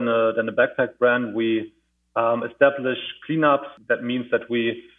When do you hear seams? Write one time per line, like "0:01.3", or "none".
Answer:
0:03.7